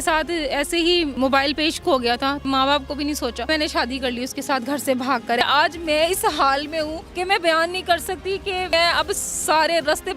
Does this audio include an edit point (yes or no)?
yes